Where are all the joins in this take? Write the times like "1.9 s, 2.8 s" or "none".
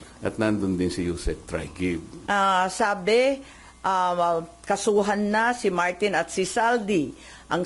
2.1 s